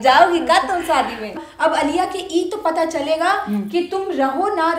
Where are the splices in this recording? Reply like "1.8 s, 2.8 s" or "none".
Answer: 1.4 s